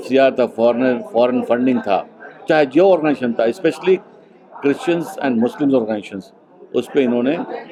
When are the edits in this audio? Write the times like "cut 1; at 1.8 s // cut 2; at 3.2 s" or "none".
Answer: none